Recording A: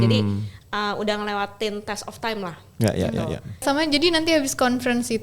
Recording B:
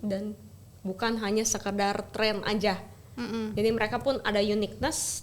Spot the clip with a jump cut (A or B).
A